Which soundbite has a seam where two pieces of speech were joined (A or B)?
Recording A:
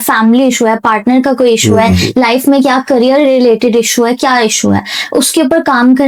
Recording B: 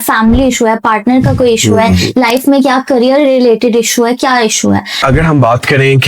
B